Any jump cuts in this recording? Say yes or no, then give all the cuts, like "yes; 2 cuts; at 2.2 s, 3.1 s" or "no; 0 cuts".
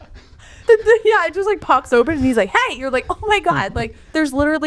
no; 0 cuts